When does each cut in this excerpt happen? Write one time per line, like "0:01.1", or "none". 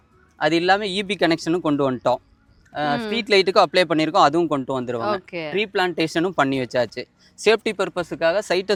none